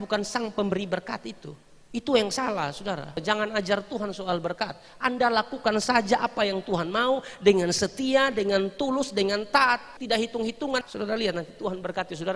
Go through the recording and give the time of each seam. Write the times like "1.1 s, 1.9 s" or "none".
3.2 s, 9.9 s, 10.9 s

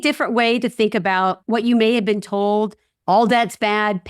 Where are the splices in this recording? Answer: 1.4 s, 2.9 s

